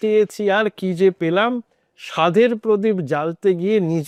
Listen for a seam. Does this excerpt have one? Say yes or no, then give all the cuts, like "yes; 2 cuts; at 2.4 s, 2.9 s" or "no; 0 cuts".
no; 0 cuts